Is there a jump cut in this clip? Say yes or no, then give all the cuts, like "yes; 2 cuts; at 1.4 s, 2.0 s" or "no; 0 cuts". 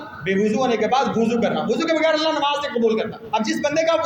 no; 0 cuts